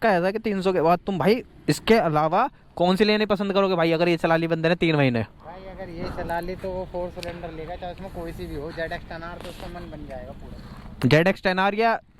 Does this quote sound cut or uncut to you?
uncut